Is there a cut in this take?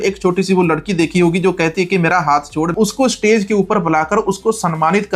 yes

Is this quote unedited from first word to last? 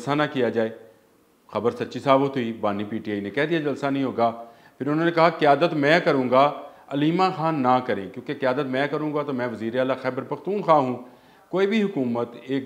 yes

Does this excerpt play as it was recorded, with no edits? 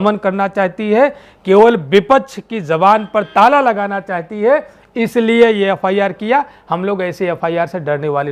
yes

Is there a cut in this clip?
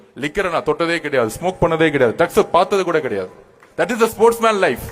no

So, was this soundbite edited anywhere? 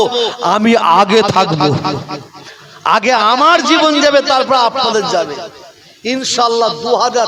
no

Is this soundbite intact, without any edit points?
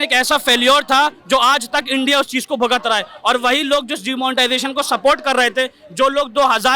yes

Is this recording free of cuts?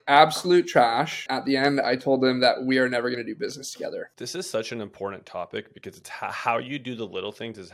no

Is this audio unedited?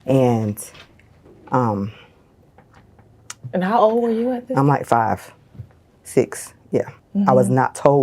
no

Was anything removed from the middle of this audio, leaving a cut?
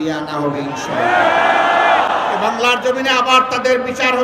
no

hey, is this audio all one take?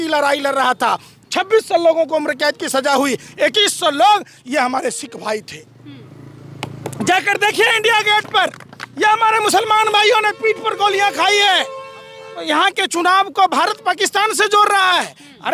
no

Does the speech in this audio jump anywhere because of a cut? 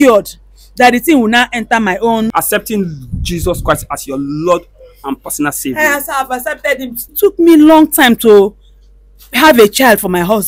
yes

